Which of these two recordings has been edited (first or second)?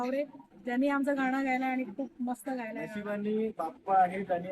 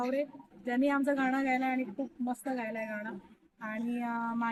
first